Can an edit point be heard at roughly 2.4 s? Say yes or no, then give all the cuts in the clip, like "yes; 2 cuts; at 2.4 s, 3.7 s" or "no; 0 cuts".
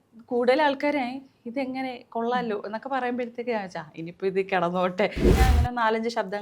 no; 1 cut; at 5.2 s